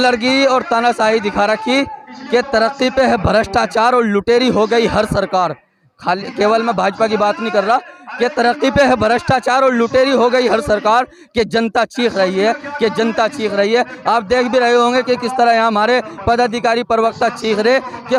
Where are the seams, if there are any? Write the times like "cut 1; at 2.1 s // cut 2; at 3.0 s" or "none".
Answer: none